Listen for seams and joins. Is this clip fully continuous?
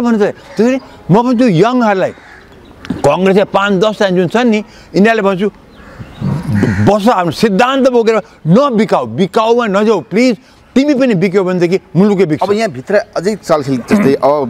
yes; 0 cuts

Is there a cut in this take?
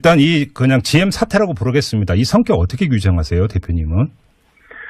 yes; 1 cut; at 3.7 s

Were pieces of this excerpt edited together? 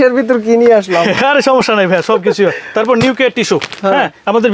no; 0 cuts

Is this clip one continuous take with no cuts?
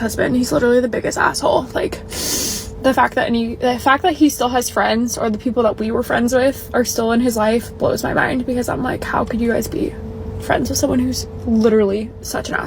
yes; 0 cuts

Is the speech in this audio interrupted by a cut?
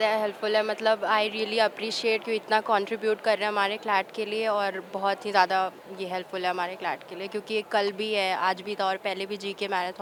no; 0 cuts

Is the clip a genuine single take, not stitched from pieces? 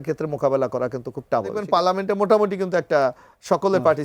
no; 1 cut; at 1.6 s

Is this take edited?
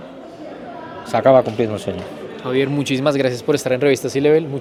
no; 0 cuts

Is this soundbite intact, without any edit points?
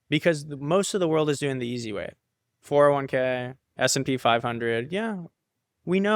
yes; 0 cuts

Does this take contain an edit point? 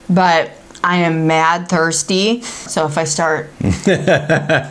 yes; 1 cut; at 2.7 s

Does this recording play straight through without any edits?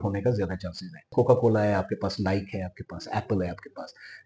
no; 1 cut; at 1.0 s

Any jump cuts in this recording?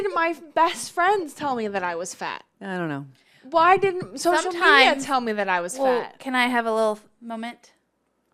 no; 0 cuts

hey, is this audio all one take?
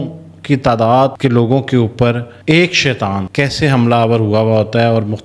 yes; 0 cuts

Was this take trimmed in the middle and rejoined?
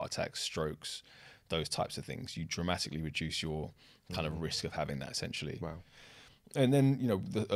no; 0 cuts

